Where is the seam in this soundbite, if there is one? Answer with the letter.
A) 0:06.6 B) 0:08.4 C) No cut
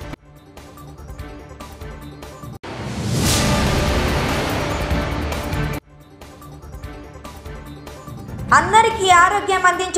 C